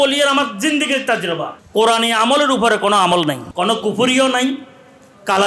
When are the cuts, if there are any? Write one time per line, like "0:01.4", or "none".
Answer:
0:01.6
0:03.5